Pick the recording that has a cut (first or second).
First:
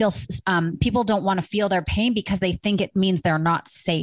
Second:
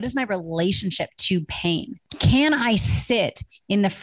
second